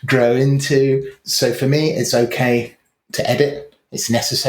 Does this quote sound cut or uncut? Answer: cut